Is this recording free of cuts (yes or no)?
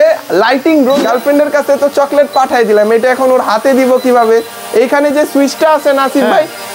no